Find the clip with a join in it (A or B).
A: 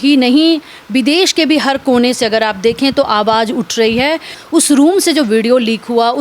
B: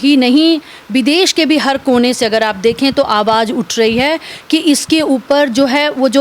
A